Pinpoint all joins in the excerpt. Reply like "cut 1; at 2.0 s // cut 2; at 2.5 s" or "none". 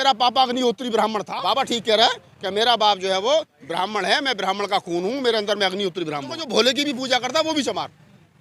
cut 1; at 1.3 s // cut 2; at 6.4 s